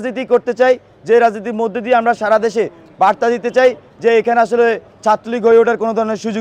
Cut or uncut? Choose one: uncut